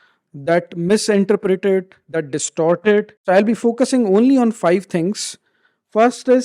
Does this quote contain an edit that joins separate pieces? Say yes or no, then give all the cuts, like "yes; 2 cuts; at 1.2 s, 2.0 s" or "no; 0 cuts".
yes; 1 cut; at 3.1 s